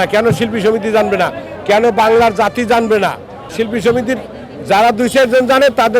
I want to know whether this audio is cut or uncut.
cut